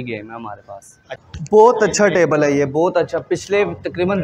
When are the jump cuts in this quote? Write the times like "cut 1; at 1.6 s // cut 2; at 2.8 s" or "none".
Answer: cut 1; at 1.2 s